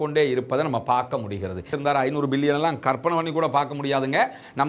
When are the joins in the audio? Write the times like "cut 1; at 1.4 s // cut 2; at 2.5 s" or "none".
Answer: cut 1; at 1.7 s